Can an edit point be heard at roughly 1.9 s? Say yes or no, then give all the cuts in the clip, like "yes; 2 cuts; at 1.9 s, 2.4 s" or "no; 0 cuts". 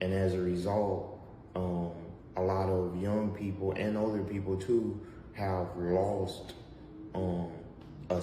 no; 0 cuts